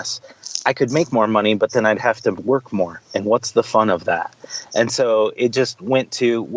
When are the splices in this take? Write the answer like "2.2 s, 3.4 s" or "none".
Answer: none